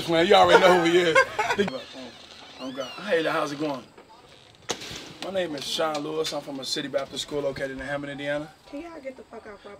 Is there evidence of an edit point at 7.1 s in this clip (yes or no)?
no